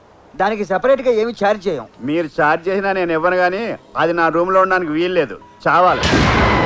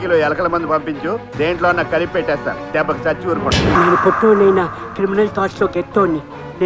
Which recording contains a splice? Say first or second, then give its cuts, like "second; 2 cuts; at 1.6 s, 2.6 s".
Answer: second; 1 cut; at 3.8 s